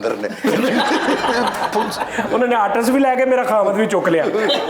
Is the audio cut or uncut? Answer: uncut